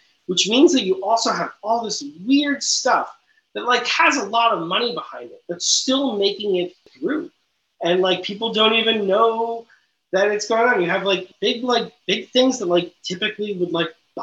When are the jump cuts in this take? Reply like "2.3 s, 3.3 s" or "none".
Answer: 6.9 s, 11.3 s